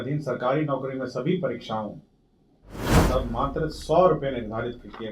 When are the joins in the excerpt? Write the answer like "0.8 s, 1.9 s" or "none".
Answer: 3.0 s